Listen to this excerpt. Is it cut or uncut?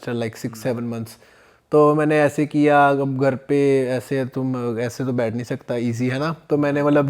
uncut